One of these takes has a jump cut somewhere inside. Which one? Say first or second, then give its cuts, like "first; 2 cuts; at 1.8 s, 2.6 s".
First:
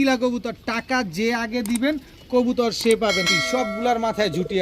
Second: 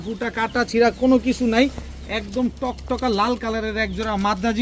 first; 1 cut; at 3.3 s